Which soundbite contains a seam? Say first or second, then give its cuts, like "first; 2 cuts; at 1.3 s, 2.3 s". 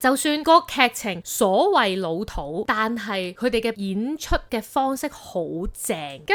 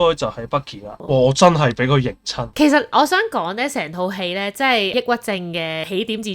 second; 2 cuts; at 0.9 s, 2.5 s